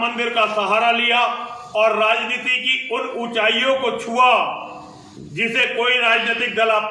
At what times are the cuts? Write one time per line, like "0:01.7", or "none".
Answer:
none